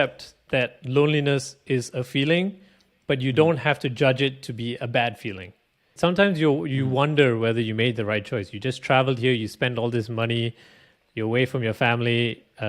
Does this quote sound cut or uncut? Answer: cut